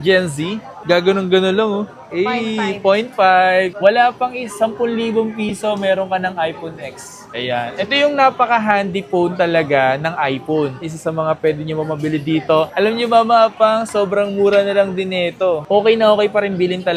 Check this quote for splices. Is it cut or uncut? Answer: cut